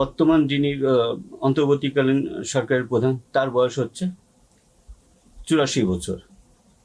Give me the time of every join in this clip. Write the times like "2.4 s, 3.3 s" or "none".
none